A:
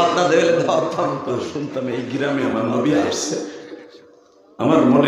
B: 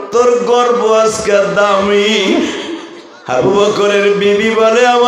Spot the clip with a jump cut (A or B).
A